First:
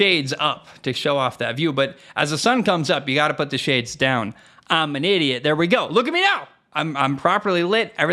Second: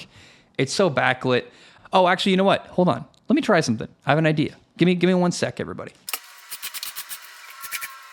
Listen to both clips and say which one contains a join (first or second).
second